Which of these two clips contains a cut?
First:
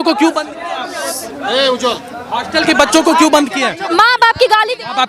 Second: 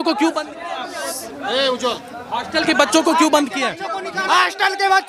first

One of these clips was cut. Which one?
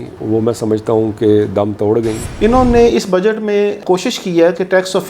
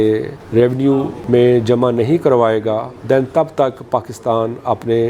first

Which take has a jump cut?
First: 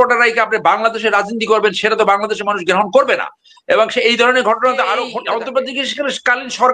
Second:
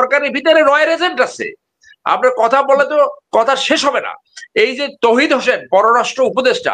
first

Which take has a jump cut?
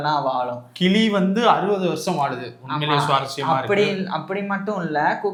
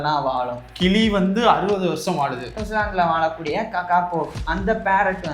second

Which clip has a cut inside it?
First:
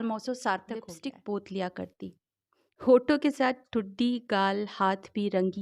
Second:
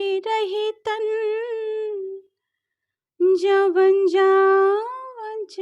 first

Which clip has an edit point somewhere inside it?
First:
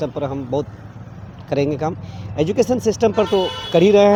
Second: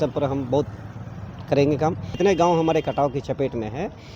second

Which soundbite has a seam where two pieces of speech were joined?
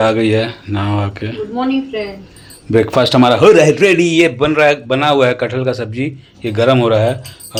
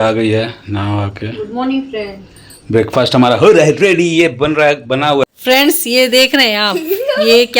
second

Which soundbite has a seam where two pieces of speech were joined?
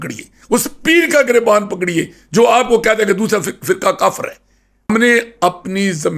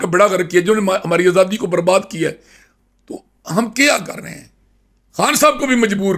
first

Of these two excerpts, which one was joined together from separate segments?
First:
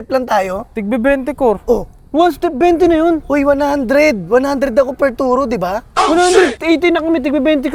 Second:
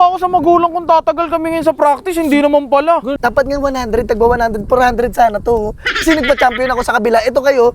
second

